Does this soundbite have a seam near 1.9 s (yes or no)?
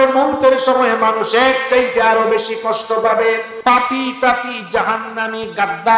no